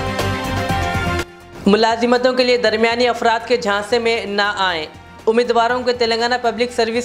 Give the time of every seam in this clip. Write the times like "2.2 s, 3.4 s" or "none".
1.1 s